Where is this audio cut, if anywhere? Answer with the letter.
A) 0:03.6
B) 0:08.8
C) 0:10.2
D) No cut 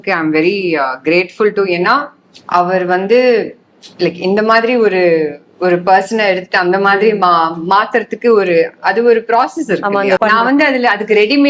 C